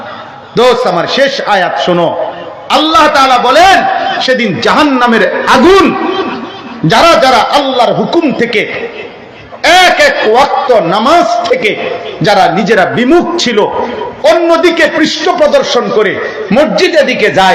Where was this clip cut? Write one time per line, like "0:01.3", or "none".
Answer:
none